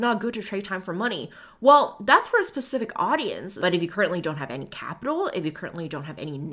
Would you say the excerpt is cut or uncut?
cut